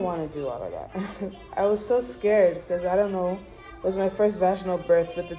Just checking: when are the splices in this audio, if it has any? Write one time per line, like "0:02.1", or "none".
none

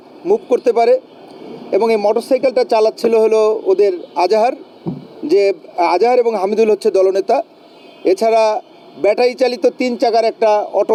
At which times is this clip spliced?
none

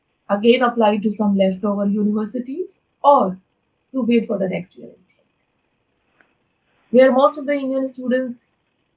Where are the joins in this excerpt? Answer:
none

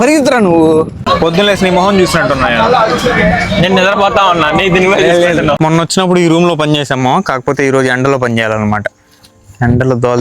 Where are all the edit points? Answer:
0:01.1
0:05.6

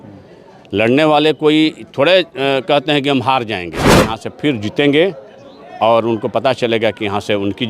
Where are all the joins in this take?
0:04.1

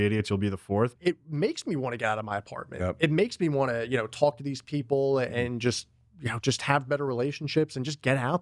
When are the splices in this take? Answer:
0:01.0

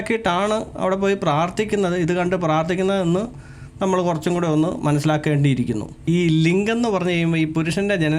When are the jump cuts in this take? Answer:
0:06.0

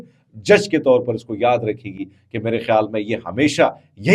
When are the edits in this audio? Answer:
none

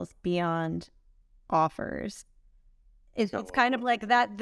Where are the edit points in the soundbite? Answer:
none

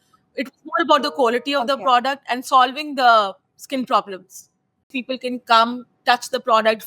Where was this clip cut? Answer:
0:04.9

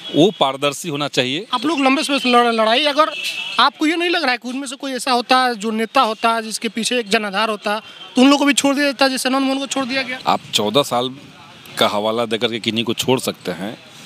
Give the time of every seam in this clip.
0:01.4
0:10.1

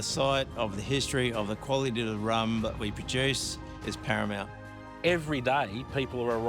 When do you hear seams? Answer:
0:04.9

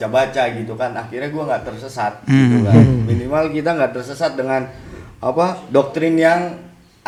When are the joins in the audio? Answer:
none

